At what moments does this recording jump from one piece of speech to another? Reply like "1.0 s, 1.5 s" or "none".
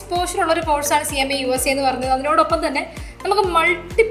none